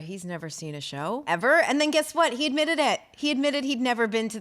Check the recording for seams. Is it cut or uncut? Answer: cut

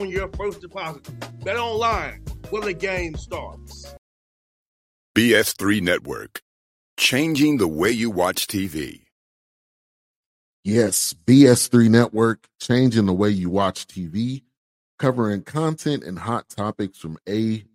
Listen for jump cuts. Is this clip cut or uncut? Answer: cut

